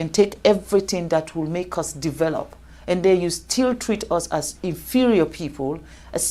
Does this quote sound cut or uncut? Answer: uncut